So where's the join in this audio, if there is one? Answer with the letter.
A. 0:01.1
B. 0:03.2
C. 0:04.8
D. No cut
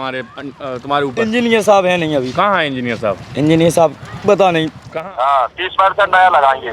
C